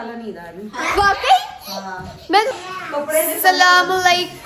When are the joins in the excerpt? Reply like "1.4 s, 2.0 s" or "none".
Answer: 2.6 s